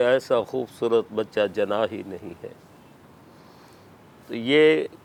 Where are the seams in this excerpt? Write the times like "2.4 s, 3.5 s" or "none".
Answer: none

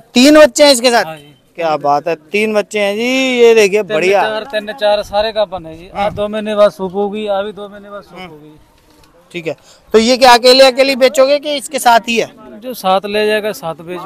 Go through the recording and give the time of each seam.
none

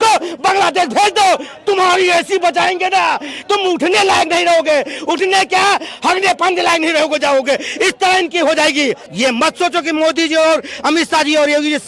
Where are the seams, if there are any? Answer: 9.1 s

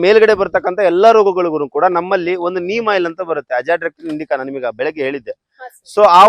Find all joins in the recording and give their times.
none

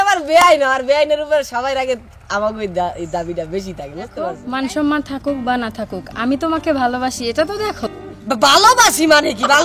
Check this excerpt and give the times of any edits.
4.4 s

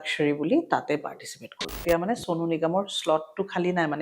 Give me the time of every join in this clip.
1.8 s

